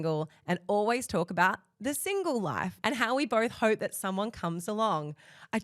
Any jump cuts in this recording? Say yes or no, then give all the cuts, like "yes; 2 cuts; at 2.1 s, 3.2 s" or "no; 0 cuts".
yes; 1 cut; at 2.7 s